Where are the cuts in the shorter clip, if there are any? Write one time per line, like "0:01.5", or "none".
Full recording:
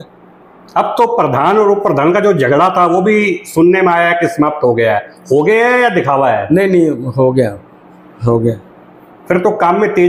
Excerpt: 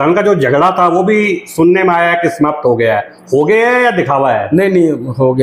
none

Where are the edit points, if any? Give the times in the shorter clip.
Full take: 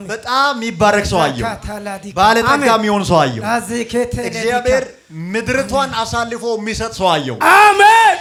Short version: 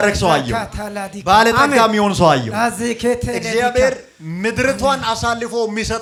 none

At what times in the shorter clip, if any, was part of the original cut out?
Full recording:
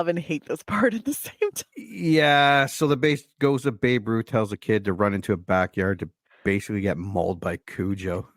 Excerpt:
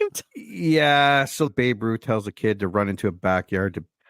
0:01.5

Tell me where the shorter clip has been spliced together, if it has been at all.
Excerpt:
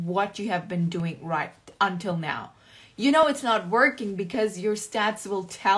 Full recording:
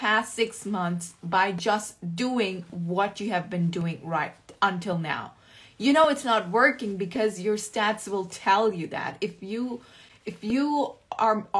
none

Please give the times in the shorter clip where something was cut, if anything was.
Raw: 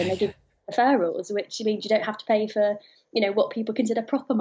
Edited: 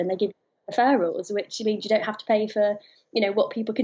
none

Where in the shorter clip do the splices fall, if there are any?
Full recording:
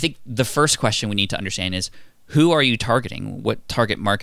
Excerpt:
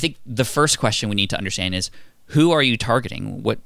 none

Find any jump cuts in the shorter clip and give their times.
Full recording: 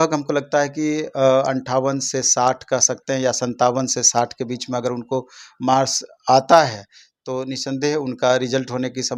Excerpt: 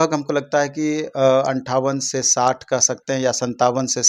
none

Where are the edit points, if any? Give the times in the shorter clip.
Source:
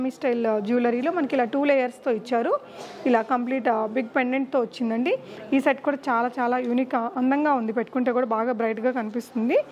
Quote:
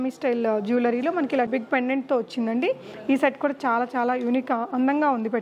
0:01.5

